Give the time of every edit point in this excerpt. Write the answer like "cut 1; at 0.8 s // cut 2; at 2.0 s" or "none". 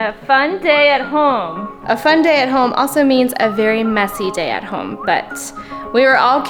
none